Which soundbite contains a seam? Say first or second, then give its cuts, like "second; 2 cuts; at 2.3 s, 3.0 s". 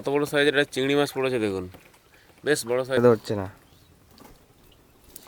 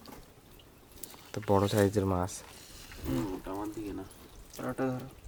first; 1 cut; at 3.0 s